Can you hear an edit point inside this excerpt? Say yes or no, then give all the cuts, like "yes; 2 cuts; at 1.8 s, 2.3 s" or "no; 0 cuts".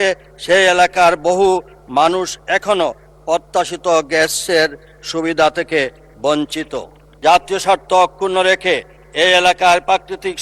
yes; 1 cut; at 7.1 s